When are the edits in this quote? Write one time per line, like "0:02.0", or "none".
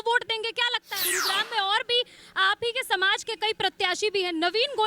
0:01.1